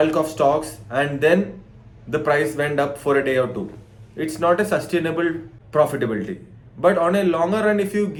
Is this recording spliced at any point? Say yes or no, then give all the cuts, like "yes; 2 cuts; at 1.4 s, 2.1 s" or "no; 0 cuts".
no; 0 cuts